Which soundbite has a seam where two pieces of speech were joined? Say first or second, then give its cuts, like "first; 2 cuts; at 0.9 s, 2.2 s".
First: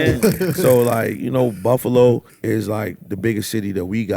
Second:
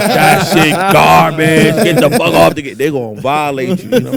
first; 1 cut; at 2.3 s